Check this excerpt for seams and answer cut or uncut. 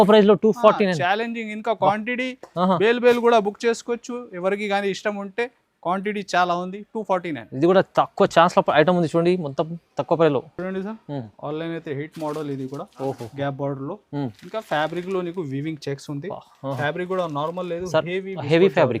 uncut